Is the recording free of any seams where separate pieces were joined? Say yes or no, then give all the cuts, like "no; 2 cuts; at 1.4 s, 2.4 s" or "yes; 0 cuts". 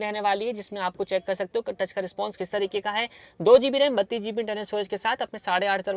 yes; 0 cuts